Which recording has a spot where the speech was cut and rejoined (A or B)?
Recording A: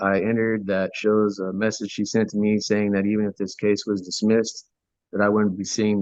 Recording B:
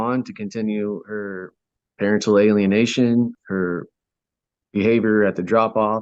B